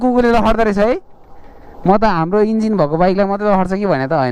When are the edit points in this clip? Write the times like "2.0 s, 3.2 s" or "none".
none